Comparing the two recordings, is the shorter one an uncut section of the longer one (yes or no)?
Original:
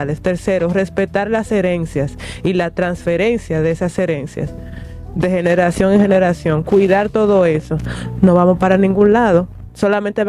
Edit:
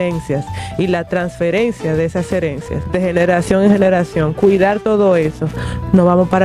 no